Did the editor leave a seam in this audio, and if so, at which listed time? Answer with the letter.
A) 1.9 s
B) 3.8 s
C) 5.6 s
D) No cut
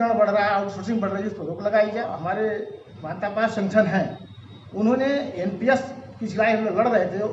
A